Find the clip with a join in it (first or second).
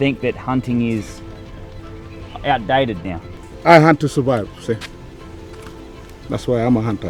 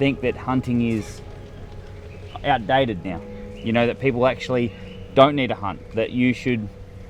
first